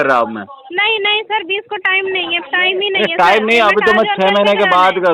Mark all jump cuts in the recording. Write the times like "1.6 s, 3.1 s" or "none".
none